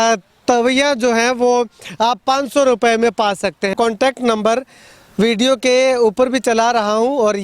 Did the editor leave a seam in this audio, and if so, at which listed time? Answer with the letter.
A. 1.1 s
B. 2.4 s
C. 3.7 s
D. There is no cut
C